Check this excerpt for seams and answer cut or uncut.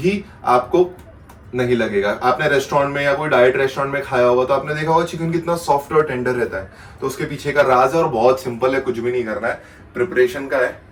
uncut